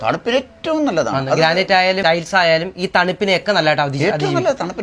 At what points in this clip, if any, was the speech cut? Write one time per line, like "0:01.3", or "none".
0:02.0